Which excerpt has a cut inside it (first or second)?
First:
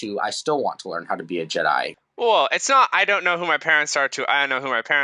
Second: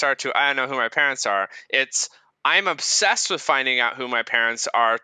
first